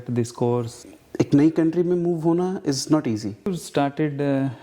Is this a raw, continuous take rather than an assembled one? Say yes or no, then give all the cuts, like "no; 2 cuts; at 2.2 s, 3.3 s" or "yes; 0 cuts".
no; 2 cuts; at 0.9 s, 3.5 s